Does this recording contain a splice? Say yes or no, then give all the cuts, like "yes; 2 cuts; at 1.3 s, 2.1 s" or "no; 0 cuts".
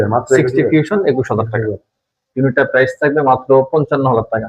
yes; 1 cut; at 2.2 s